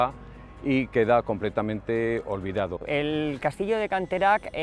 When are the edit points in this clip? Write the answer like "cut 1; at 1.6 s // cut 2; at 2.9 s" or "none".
cut 1; at 2.8 s